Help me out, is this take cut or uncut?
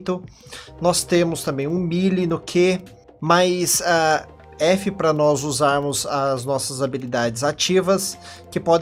uncut